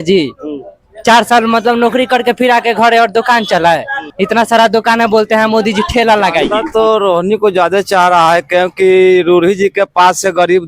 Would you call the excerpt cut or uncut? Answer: cut